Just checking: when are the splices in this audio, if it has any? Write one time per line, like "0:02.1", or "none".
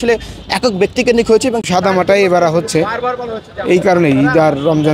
0:01.7

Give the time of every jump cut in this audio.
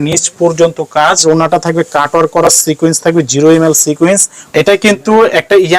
0:01.2
0:04.4

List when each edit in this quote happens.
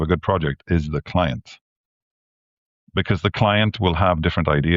none

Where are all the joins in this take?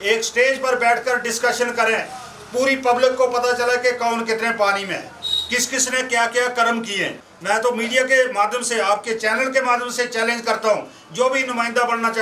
0:07.3

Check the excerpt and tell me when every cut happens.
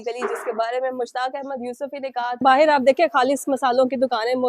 0:02.4

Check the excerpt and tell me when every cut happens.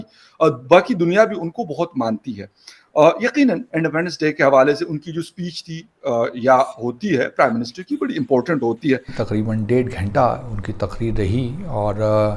0:09.1

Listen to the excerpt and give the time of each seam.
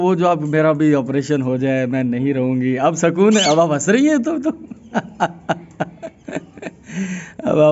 none

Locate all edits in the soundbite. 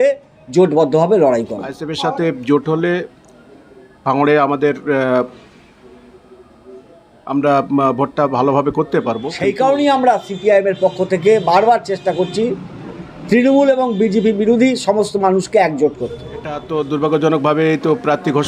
0:01.9
0:09.3
0:16.6

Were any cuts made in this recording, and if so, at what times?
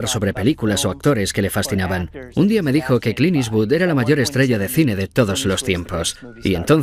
none

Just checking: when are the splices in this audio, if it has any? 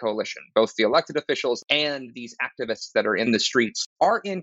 0:01.6
0:03.5

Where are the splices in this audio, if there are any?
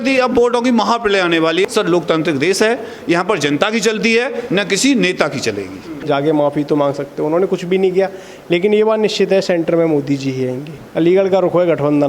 0:01.6
0:05.9
0:10.8

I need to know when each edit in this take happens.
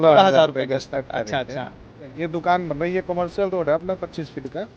0:02.1

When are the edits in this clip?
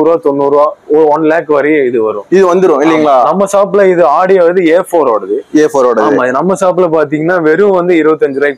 none

